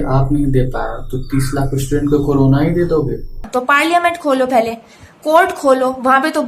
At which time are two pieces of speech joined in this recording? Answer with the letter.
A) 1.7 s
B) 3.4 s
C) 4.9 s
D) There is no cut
B